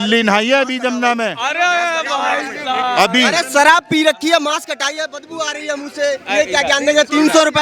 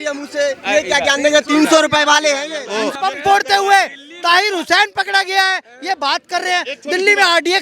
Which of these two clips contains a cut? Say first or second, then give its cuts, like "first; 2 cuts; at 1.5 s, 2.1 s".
second; 1 cut; at 2.9 s